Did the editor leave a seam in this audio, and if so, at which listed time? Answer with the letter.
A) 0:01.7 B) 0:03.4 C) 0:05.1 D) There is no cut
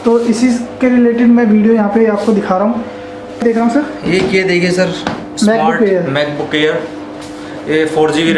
B